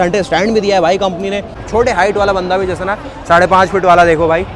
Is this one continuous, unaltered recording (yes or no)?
no